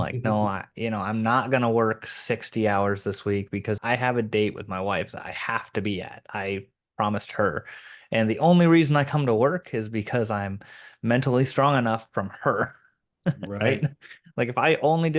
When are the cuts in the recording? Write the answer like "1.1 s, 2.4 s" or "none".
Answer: 3.8 s